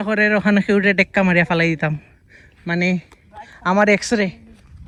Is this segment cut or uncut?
uncut